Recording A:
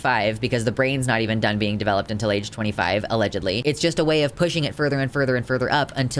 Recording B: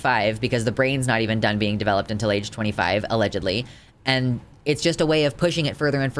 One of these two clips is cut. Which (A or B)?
A